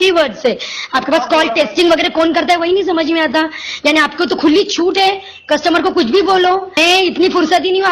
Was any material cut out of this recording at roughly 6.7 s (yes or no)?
yes